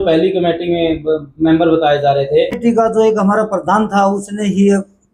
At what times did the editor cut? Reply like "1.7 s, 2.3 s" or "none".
2.6 s